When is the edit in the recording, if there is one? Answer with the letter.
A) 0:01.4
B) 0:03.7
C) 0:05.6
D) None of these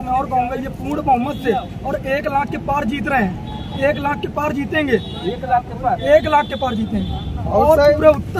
D